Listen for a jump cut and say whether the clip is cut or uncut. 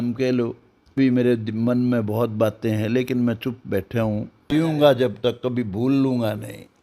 cut